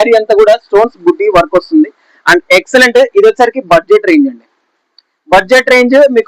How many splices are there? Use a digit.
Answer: 0